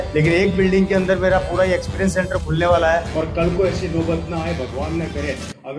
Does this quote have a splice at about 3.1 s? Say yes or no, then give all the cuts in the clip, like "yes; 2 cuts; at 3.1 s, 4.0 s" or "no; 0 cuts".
yes; 1 cut; at 3.1 s